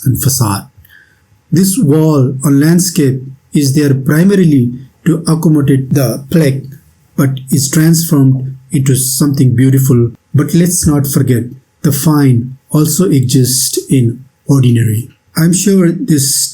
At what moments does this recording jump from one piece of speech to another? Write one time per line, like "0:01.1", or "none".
0:05.9
0:10.2
0:15.1

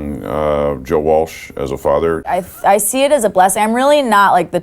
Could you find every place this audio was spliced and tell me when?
0:02.3

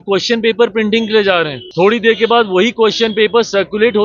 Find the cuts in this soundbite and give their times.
0:01.6

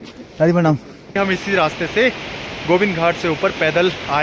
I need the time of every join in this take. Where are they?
0:01.2

